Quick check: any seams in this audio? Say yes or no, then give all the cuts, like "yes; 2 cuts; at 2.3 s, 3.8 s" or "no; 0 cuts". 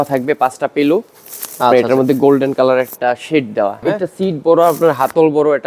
yes; 1 cut; at 3.8 s